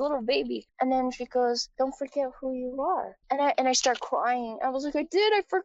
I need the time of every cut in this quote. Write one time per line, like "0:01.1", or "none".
0:01.7
0:03.2